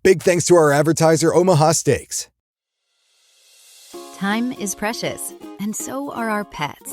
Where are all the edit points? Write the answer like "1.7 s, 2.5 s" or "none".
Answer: 2.5 s